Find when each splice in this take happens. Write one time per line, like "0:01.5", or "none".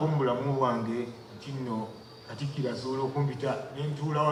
none